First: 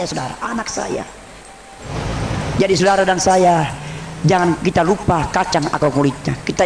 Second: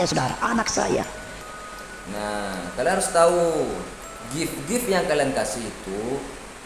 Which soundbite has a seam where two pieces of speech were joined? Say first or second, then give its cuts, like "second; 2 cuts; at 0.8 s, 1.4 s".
first; 1 cut; at 1.9 s